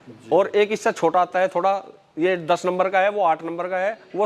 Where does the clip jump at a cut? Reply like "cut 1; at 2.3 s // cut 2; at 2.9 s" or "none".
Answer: none